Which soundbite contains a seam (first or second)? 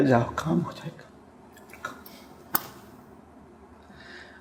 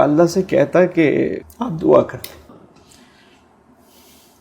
second